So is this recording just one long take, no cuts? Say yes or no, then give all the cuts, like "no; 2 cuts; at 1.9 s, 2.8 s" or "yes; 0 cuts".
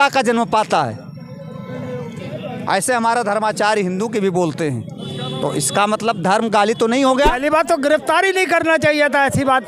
no; 1 cut; at 7.4 s